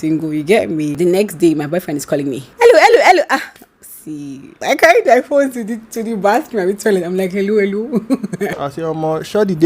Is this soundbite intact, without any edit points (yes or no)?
no